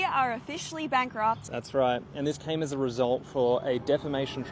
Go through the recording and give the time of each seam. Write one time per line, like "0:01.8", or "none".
0:01.5